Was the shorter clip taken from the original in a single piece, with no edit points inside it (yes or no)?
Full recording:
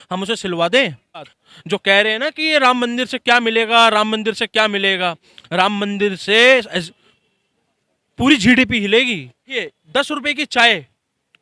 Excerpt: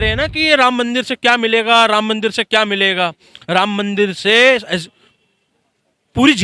yes